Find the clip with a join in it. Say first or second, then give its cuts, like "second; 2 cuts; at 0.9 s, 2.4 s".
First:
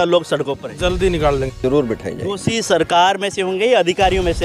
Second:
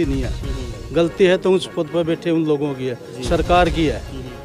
first; 1 cut; at 1.6 s